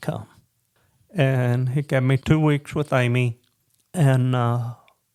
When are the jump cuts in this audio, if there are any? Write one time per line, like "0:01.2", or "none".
none